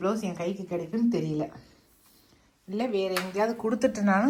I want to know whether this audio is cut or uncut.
uncut